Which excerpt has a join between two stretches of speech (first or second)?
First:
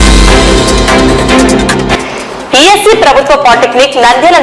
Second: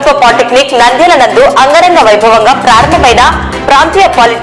first